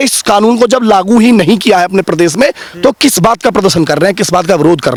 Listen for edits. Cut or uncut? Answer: uncut